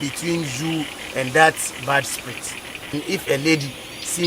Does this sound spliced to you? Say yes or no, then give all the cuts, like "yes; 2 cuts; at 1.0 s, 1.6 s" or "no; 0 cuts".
yes; 1 cut; at 2.9 s